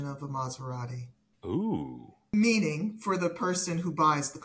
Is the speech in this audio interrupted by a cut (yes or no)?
yes